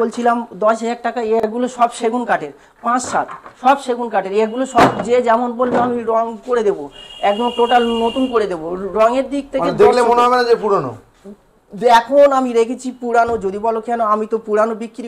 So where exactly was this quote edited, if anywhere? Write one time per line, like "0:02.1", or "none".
none